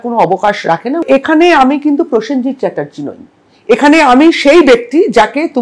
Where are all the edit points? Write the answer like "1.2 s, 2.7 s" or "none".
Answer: 1.0 s